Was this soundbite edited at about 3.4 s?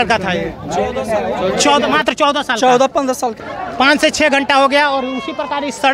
yes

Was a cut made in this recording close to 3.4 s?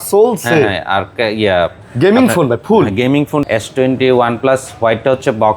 yes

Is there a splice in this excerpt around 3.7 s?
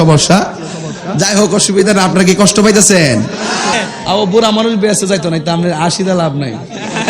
yes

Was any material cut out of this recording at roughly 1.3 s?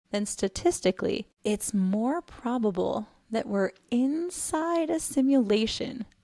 yes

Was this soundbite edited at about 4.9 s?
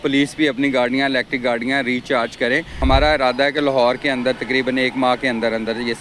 no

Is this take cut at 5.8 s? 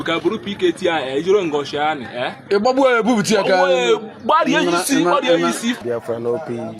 yes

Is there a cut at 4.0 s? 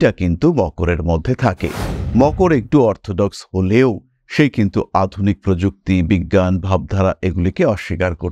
no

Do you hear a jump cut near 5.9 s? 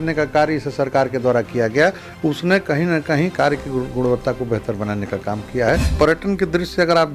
yes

